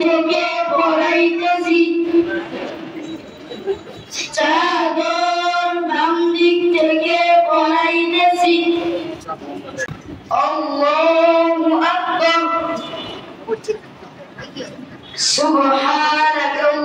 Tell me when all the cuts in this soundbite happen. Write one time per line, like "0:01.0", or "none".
0:09.9